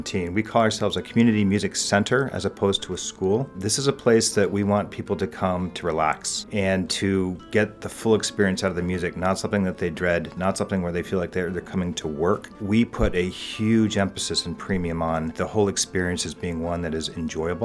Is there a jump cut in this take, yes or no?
yes